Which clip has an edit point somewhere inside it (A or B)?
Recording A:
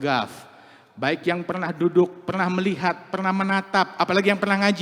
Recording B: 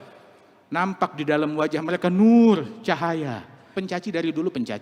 B